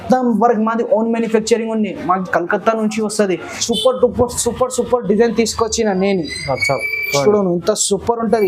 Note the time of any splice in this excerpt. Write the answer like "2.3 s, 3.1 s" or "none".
3.6 s

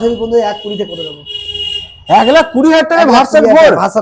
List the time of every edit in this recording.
none

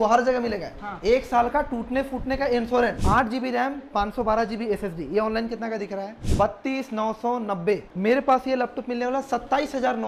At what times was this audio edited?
3.0 s, 7.9 s

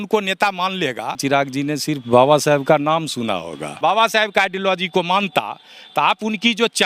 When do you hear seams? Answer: 1.2 s, 3.8 s

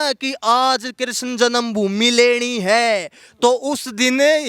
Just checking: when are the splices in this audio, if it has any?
none

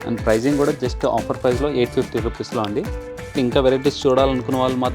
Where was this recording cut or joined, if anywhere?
3.4 s

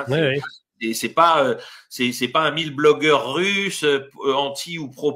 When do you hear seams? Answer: none

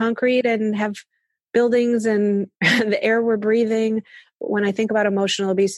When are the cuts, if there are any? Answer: 4.4 s

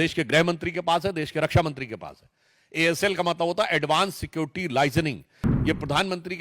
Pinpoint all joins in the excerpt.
5.5 s

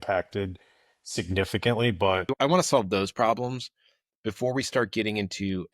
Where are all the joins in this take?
2.3 s

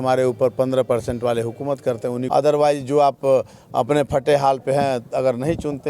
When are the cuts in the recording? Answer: 2.2 s

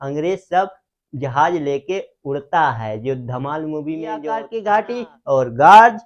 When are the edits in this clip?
4.5 s

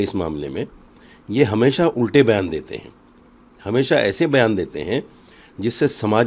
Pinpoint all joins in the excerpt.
none

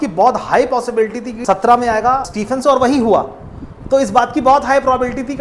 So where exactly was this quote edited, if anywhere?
1.3 s, 2.2 s

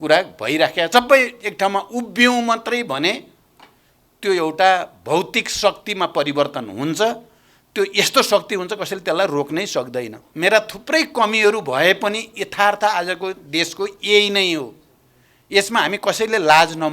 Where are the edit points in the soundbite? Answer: 0.9 s, 10.2 s

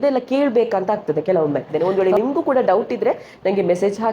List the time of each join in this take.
1.7 s

